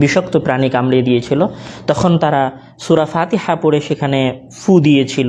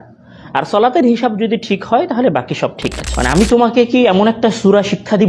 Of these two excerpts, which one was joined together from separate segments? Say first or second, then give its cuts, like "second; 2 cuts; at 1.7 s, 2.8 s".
second; 1 cut; at 3.0 s